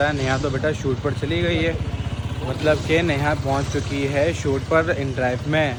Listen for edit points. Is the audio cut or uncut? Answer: uncut